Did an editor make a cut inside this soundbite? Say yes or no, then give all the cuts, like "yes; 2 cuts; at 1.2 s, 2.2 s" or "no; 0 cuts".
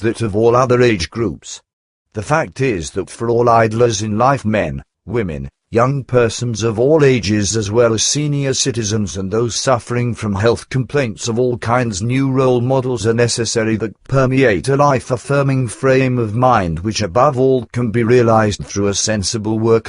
yes; 1 cut; at 7.1 s